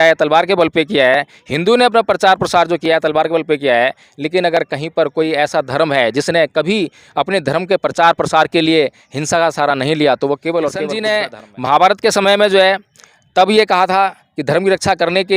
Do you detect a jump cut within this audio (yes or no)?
yes